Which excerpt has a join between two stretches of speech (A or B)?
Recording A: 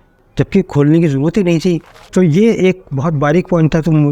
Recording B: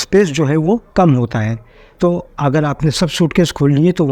A